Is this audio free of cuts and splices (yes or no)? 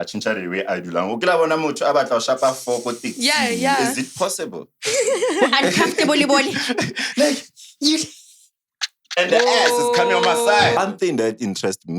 no